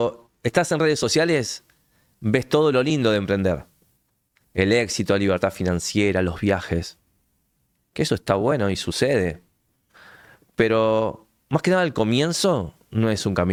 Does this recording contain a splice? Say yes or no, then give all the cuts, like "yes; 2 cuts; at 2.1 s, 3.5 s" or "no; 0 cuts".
no; 0 cuts